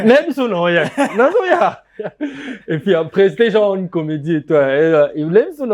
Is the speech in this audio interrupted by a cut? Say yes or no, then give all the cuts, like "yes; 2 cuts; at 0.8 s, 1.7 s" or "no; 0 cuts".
no; 0 cuts